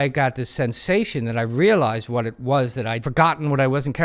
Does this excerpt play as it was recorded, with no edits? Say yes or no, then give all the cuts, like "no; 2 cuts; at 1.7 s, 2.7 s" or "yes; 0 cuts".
no; 1 cut; at 3.0 s